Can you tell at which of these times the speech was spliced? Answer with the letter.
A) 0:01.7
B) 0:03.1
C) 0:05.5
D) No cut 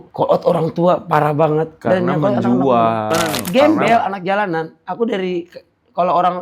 B